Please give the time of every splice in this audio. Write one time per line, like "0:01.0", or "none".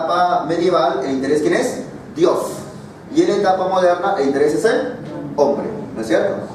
0:01.9